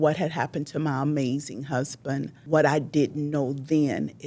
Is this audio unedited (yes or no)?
no